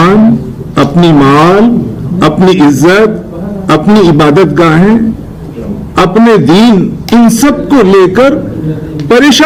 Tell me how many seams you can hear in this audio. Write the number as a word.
zero